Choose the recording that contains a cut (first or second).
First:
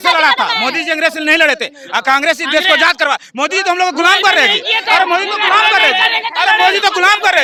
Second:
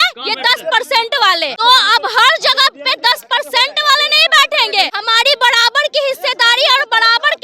second